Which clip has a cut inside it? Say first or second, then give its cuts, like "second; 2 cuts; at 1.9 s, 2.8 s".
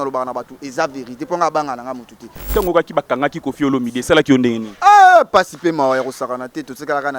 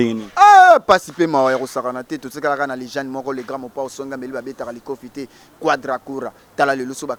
first; 1 cut; at 2.4 s